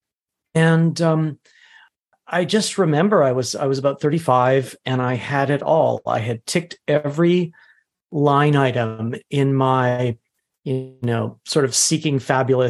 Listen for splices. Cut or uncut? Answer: cut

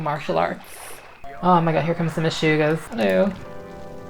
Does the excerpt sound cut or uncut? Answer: cut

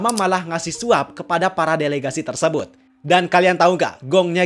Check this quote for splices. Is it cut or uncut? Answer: uncut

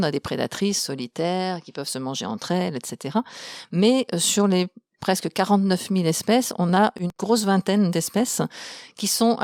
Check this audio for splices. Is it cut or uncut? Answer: uncut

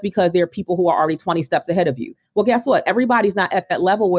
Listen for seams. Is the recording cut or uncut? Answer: uncut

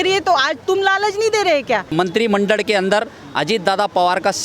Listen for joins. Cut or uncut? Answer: cut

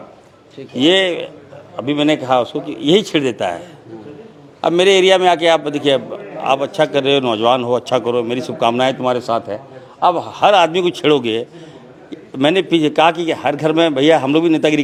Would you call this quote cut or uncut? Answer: uncut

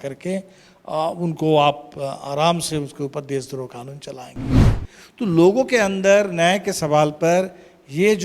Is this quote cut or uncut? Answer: cut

